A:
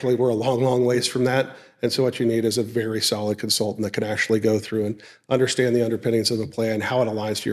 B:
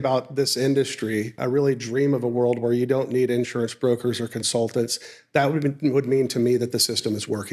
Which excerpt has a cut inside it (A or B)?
B